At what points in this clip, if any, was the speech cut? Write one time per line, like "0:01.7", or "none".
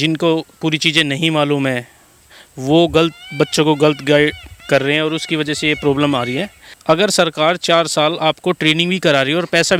none